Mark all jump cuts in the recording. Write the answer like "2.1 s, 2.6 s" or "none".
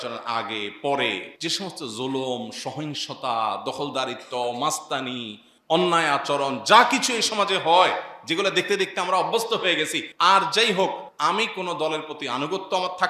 1.3 s, 10.0 s, 11.1 s